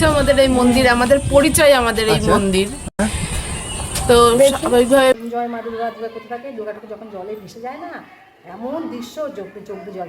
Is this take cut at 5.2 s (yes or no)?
yes